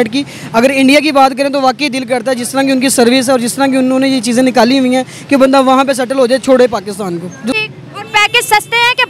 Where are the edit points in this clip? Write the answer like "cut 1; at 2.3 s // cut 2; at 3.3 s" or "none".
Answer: cut 1; at 7.6 s